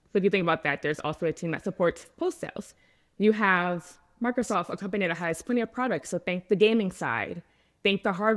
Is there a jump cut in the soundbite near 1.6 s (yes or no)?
yes